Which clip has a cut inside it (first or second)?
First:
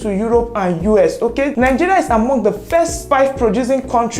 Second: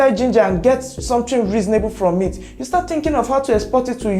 first